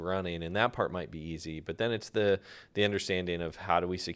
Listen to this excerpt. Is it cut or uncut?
uncut